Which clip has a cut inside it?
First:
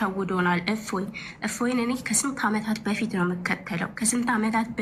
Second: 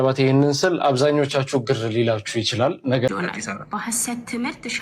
second; 1 cut; at 3.1 s

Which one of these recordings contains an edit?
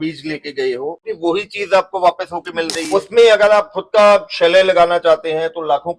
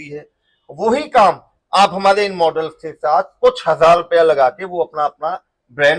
first; 2 cuts; at 1.1 s, 2.8 s

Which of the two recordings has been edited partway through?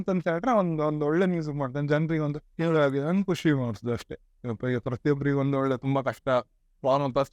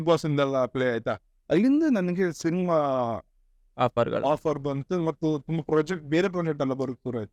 first; 1 cut; at 2.4 s

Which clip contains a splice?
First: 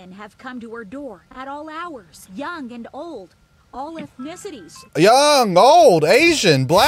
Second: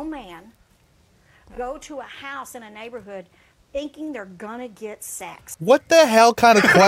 first; 2 cuts; at 2.2 s, 4.7 s

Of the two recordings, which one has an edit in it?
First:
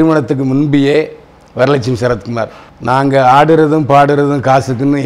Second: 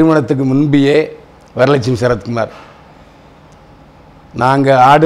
first; 1 cut; at 2.7 s

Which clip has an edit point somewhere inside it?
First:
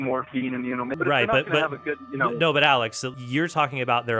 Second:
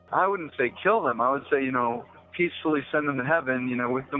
first; 2 cuts; at 0.9 s, 3.0 s

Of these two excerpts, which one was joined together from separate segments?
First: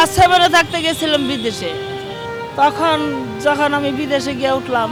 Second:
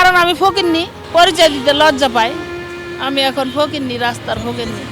second; 1 cut; at 0.9 s

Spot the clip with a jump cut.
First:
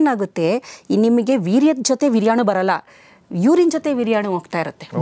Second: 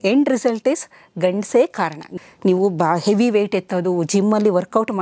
second; 1 cut; at 2.1 s

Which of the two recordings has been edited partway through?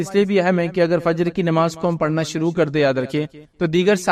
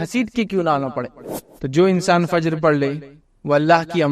second; 1 cut; at 1.2 s

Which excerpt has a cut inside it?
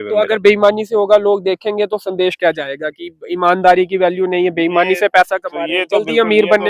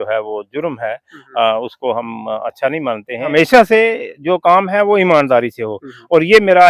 second; 1 cut; at 3.3 s

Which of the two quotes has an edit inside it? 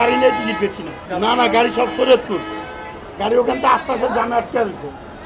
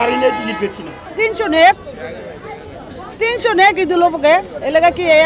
second; 1 cut; at 1.0 s

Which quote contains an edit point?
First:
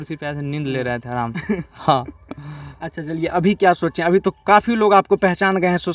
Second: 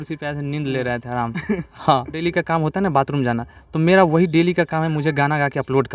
second; 1 cut; at 2.2 s

